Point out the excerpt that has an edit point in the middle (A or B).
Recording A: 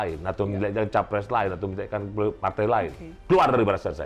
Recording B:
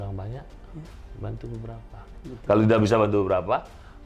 A